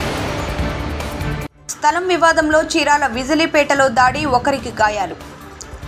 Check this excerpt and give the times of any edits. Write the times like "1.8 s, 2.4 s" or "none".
1.5 s